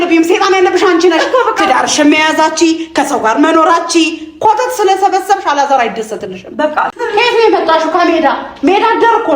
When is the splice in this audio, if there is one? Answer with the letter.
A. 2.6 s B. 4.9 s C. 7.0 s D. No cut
C